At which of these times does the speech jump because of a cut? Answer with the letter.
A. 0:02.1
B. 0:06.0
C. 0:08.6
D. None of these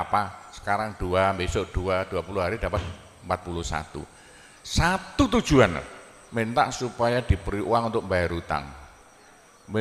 D